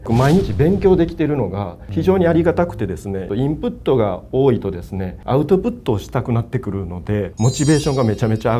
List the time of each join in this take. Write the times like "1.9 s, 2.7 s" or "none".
7.3 s